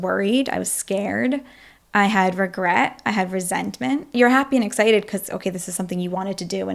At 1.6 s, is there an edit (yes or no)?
no